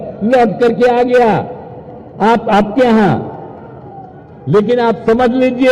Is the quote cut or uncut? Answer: uncut